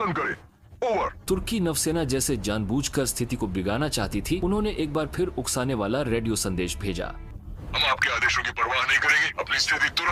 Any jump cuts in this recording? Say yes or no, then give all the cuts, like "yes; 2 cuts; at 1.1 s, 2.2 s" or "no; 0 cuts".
no; 0 cuts